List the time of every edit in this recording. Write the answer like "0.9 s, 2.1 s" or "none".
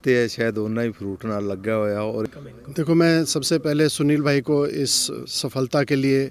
2.2 s